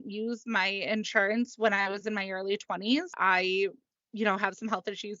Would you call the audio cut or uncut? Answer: cut